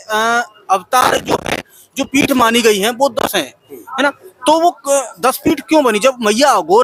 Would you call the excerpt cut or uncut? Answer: uncut